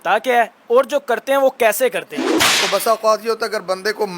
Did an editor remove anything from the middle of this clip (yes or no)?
yes